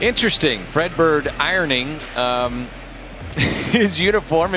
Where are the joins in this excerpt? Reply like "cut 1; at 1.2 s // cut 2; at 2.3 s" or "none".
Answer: none